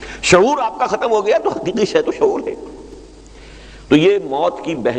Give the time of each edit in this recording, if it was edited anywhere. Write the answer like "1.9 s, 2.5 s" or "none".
none